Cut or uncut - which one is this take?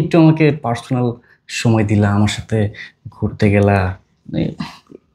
uncut